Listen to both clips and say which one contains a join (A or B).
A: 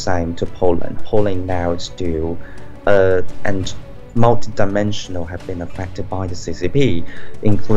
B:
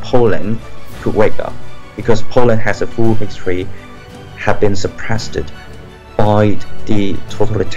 A